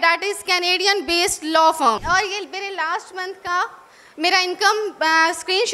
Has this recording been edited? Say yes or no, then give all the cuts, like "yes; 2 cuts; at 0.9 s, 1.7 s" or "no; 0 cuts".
yes; 1 cut; at 2.0 s